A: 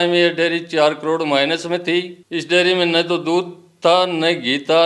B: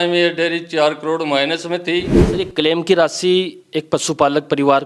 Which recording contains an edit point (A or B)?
B